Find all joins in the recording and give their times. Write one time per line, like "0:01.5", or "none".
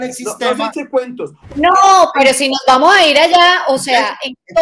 0:01.5